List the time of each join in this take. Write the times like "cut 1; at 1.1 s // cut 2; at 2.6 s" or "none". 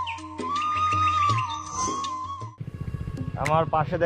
cut 1; at 2.5 s